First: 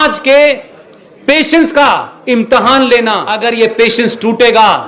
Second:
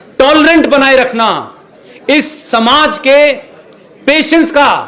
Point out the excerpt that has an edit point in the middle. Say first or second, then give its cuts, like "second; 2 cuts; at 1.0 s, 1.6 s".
first; 1 cut; at 3.3 s